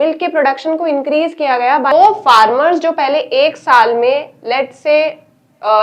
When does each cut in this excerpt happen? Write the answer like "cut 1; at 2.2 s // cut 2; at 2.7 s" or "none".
cut 1; at 1.9 s